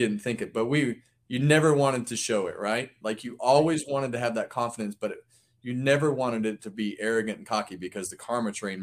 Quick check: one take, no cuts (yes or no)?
yes